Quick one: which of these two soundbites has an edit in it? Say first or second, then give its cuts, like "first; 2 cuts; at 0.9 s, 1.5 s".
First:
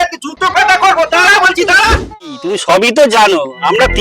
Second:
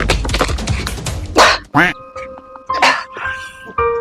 first; 1 cut; at 2.2 s